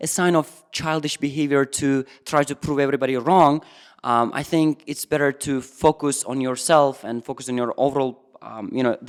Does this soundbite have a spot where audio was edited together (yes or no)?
no